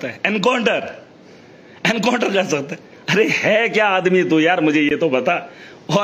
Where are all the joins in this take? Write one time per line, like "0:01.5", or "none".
none